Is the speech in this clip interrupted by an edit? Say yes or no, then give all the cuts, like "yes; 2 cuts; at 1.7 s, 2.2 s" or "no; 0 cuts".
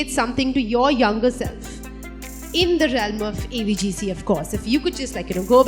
no; 0 cuts